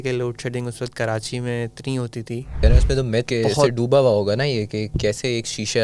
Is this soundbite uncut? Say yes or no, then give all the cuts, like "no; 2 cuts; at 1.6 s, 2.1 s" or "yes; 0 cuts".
no; 1 cut; at 2.7 s